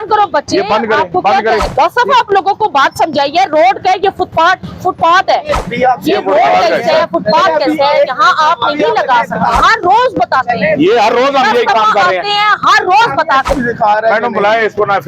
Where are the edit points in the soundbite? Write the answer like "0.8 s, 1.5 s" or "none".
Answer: 1.7 s, 5.7 s, 9.6 s, 13.5 s